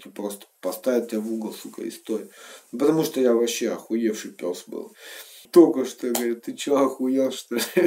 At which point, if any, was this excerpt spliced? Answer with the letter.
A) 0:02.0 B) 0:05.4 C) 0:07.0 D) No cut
B